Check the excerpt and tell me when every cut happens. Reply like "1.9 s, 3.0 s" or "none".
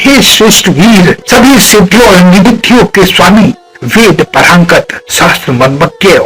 1.2 s